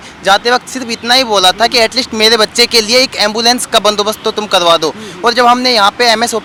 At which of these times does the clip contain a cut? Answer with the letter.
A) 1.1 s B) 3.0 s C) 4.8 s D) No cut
D